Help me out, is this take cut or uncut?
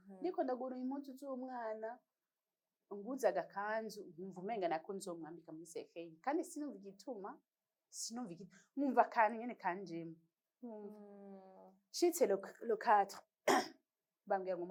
uncut